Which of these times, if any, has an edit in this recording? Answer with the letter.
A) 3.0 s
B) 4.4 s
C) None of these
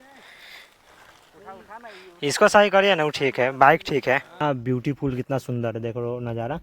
B